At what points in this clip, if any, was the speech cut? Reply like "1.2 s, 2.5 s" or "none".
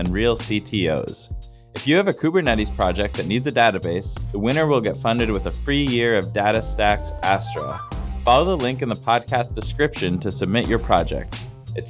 none